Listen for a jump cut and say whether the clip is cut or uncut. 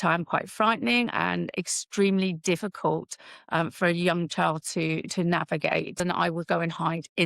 cut